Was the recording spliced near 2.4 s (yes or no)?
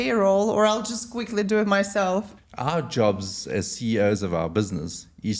yes